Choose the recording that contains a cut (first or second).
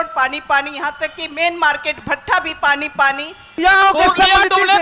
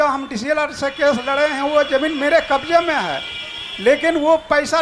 first